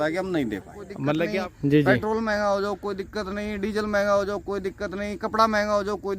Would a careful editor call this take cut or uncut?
cut